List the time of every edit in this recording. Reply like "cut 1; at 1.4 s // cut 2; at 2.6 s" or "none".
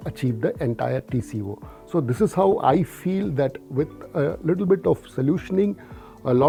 none